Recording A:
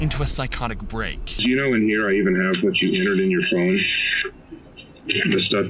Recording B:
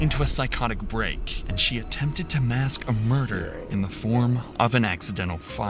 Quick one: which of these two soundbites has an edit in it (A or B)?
A